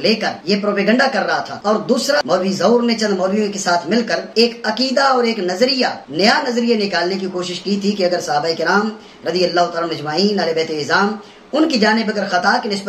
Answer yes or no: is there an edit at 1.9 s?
yes